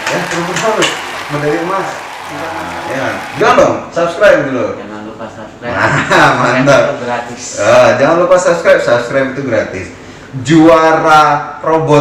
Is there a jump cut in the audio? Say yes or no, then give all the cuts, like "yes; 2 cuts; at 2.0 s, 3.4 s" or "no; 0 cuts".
yes; 1 cut; at 2.5 s